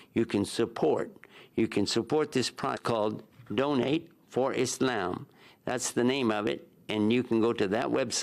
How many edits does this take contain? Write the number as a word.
one